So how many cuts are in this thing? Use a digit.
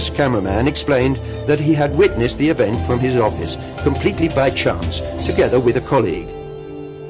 1